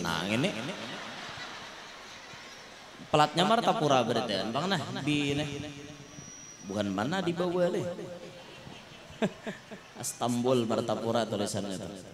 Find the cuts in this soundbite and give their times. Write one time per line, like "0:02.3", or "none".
none

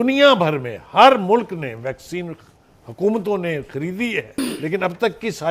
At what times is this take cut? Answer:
0:04.4

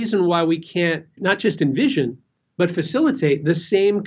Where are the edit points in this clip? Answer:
0:01.1

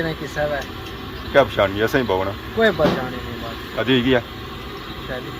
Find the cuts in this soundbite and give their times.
0:03.8

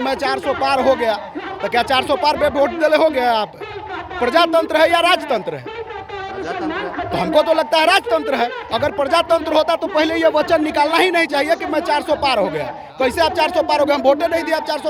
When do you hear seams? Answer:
none

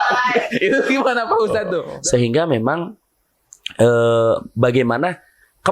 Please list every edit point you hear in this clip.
0:01.8

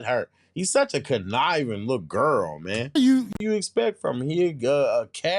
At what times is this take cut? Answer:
0:03.4

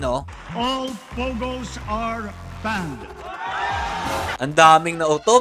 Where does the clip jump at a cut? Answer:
0:04.4

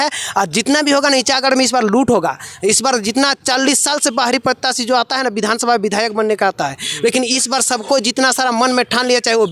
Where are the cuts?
none

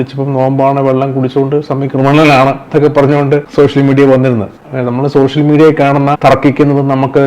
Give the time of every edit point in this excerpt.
0:04.6
0:06.2

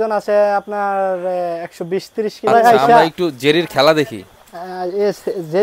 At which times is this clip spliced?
0:02.5

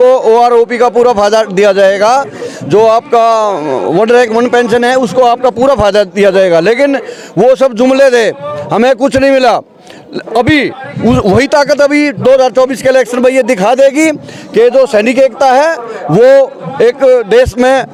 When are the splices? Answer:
none

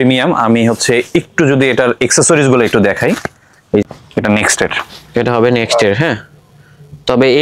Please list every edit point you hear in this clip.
0:03.8

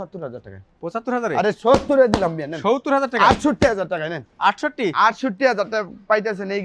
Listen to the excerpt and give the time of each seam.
none

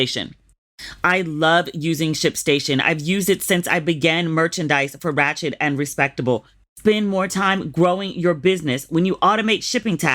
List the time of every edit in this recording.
0:06.6

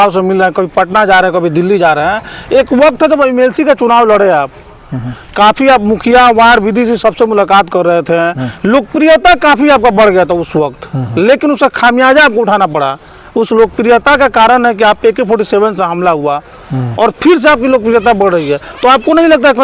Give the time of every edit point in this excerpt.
none

